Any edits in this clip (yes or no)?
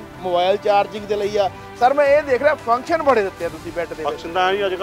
no